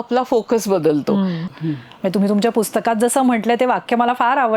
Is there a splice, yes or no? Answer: yes